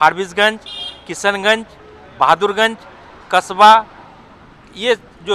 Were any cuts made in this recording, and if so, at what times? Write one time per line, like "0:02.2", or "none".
none